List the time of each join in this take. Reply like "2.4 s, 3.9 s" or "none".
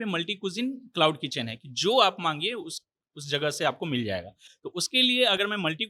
none